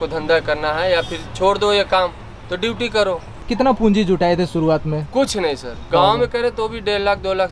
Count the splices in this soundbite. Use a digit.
2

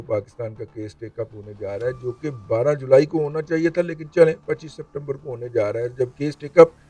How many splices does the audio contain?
0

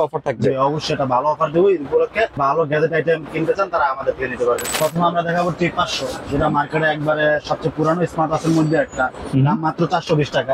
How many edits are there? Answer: 2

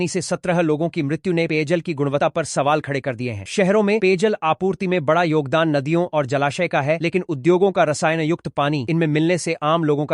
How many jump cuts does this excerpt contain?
0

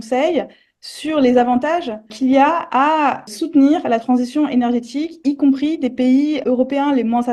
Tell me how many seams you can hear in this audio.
3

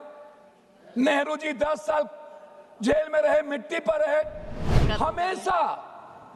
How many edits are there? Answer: 1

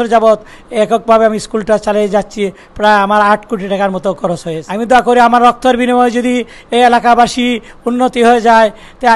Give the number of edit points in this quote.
1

